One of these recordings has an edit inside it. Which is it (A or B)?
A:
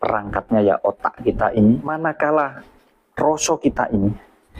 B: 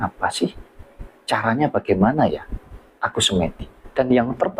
A